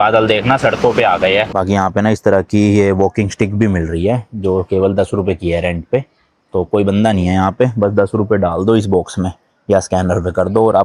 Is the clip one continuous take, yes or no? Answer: no